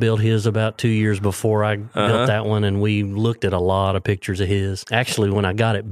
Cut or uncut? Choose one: cut